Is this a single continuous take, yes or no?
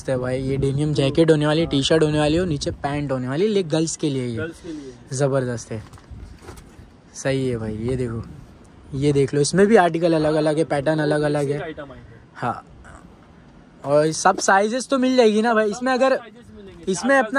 yes